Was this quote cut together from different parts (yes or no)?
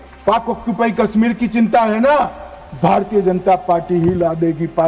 no